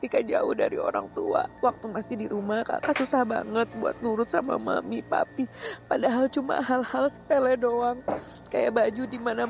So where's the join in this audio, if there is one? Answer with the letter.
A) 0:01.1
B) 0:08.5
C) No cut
C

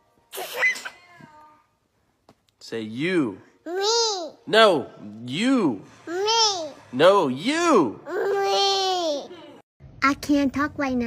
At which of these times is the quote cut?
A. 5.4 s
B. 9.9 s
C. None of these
B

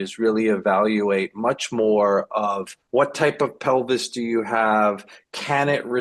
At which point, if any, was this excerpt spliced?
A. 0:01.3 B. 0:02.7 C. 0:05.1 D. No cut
B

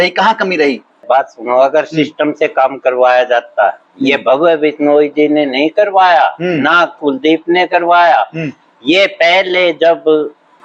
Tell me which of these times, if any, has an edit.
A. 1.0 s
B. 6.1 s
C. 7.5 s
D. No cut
A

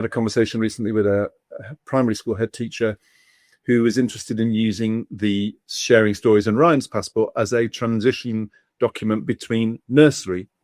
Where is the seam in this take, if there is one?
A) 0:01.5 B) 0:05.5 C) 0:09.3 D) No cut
D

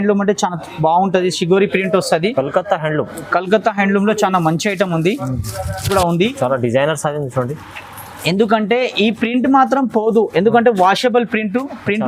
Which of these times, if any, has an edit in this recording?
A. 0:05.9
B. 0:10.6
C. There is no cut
A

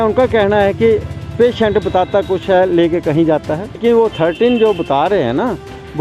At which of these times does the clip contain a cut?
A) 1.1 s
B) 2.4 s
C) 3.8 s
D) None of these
C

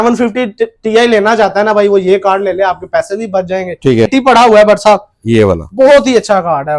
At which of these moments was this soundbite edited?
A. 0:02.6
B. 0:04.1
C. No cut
B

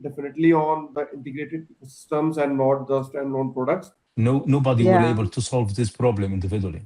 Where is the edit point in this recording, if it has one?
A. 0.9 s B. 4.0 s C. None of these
B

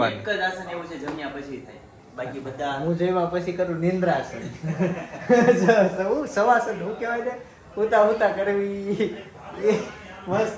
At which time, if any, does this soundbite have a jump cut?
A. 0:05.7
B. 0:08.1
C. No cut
C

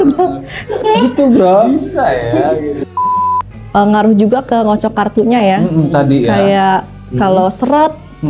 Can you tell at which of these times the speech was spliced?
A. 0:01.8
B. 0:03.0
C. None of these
B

